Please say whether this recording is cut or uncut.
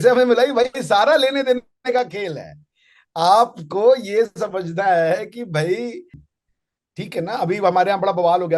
cut